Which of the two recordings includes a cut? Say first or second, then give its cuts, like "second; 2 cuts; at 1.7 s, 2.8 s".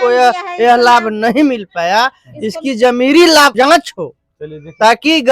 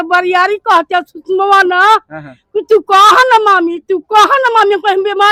first; 1 cut; at 3.5 s